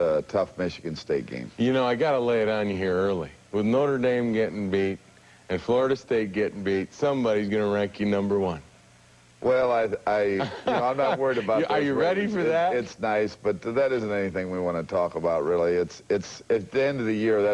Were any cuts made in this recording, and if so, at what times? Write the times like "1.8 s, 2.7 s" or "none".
10.6 s